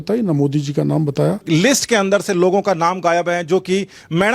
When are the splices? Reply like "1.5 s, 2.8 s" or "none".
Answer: 1.4 s